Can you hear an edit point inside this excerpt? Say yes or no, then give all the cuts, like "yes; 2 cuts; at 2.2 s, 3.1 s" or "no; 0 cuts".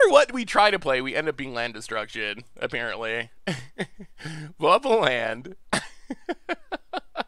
no; 0 cuts